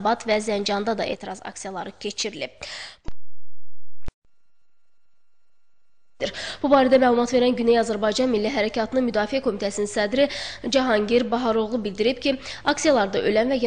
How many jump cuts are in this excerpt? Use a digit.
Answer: 1